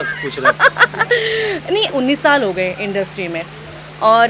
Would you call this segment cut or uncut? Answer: cut